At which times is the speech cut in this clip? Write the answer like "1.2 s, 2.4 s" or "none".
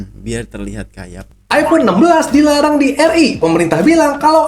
1.5 s